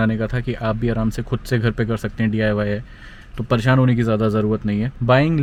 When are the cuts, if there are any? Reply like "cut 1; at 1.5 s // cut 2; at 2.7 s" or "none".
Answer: none